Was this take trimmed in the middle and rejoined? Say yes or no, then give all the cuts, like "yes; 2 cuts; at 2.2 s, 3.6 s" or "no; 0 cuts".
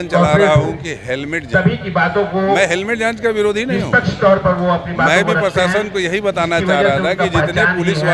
no; 0 cuts